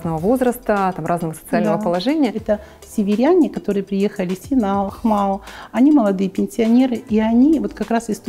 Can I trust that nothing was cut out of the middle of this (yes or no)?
no